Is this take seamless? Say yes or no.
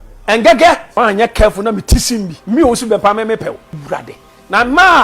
no